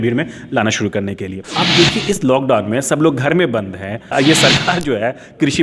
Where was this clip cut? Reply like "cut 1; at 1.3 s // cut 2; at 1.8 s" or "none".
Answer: cut 1; at 1.4 s // cut 2; at 4.1 s